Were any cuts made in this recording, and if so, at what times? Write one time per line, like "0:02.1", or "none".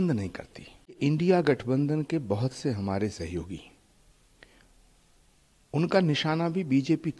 0:01.0